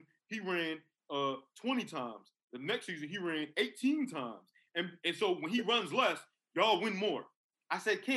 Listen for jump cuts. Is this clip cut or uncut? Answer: uncut